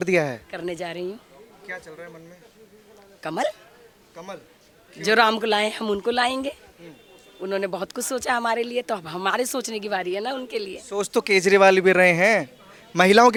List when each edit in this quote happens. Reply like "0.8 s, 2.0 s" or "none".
none

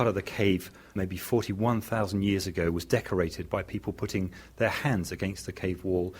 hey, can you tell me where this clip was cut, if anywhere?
0.9 s

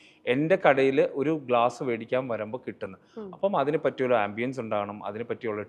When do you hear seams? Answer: none

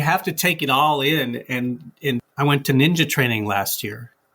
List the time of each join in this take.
2.2 s

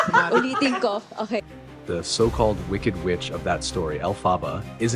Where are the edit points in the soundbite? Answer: 1.5 s

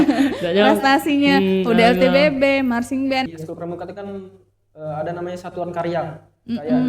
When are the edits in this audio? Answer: 3.3 s

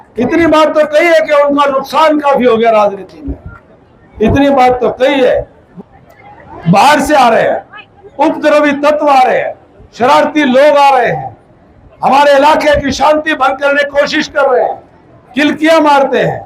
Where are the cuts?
5.6 s

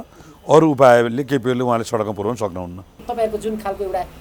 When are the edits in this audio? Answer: 3.0 s

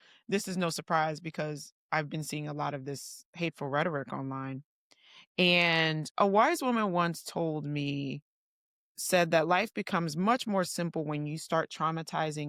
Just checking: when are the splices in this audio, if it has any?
none

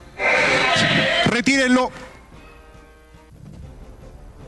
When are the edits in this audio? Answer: 2.0 s

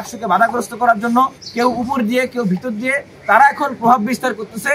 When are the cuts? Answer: 1.4 s

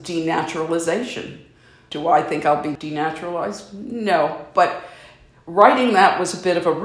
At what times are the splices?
1.8 s, 2.7 s

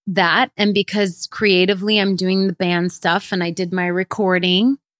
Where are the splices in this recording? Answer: none

